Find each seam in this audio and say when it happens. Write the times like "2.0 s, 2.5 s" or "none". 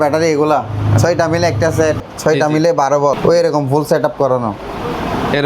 2.1 s, 3.2 s